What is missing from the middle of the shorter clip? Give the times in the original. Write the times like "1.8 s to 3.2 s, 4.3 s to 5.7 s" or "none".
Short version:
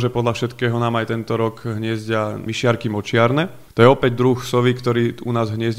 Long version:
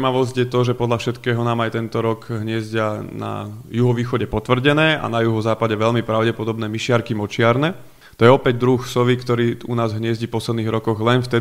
3.1 s to 6.7 s, 7.8 s to 8.0 s